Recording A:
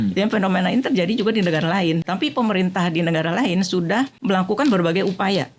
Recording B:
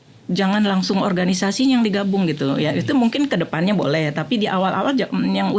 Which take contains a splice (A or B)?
A